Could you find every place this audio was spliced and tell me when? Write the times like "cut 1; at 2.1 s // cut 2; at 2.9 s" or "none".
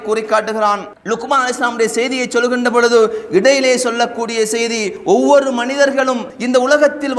cut 1; at 0.9 s

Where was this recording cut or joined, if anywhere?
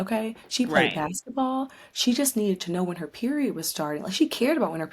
none

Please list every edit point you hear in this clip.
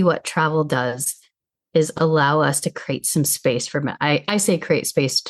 none

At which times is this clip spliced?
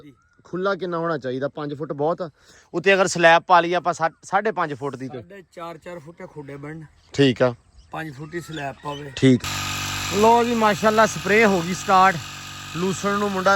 cut 1; at 9.4 s

